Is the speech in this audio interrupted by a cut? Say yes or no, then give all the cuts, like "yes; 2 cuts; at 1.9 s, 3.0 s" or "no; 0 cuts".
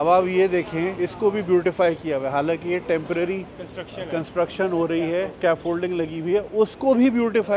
yes; 1 cut; at 1.0 s